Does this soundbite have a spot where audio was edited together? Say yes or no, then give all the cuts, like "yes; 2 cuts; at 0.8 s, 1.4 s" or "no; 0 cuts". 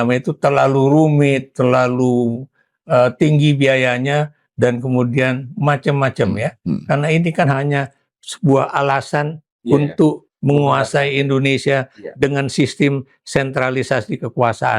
no; 0 cuts